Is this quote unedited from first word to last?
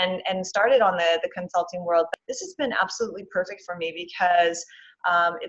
no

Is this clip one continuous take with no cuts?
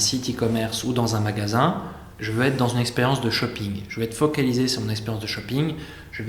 yes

